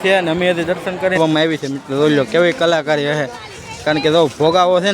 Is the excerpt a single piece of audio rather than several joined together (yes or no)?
no